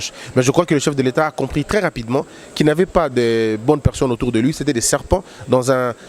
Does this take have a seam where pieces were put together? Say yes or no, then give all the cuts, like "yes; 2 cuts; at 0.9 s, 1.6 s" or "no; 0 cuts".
no; 0 cuts